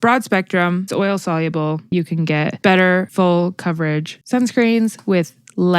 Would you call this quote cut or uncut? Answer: cut